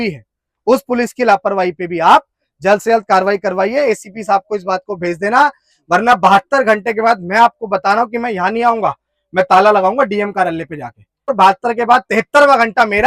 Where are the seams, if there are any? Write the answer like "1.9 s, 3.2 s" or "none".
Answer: 11.3 s

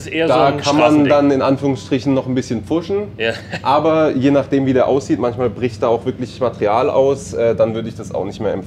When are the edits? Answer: none

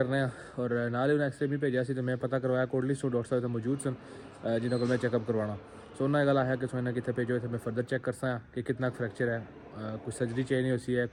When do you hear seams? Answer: none

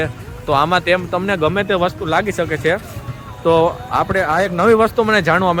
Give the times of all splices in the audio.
none

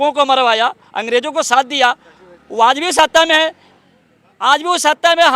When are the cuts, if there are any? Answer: none

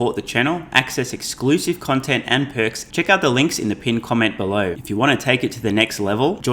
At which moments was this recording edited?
2.8 s, 4.8 s

